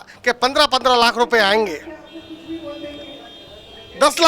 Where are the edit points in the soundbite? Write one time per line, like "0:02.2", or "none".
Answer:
none